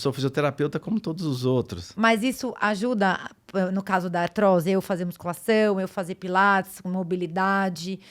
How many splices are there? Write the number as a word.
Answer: one